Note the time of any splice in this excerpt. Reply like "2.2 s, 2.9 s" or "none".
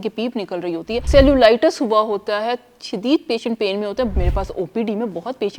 1.1 s, 4.1 s

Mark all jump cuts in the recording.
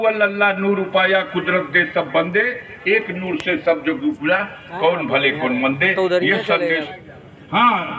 6.8 s

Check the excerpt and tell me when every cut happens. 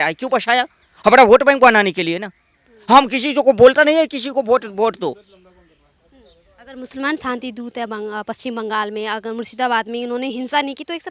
none

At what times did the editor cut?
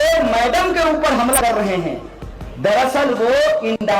1.4 s

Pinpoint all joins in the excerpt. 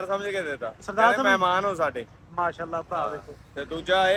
none

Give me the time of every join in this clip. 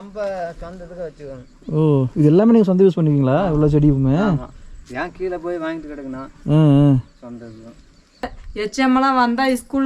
8.3 s

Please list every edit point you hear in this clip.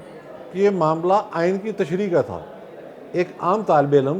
none

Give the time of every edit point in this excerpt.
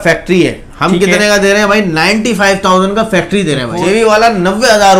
3.7 s

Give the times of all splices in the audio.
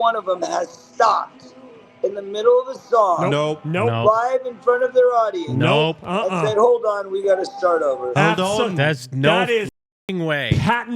none

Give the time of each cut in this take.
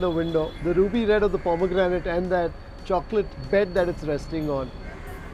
none

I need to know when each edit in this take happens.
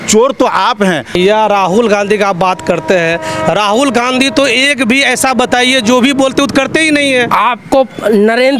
1.1 s, 7.3 s

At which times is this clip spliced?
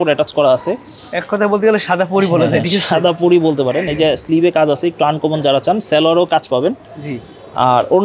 none

